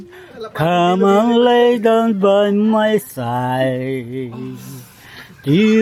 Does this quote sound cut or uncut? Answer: uncut